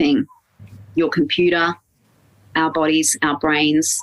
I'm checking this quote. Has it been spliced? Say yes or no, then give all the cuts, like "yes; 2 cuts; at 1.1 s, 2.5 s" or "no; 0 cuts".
no; 0 cuts